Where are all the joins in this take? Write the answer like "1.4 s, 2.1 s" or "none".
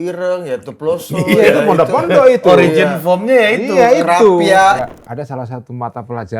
4.8 s